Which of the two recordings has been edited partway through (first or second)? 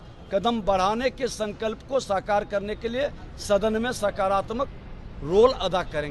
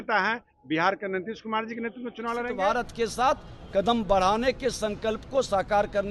second